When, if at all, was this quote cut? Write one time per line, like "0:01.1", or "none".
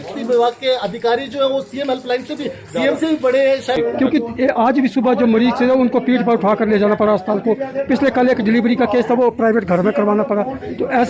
0:03.8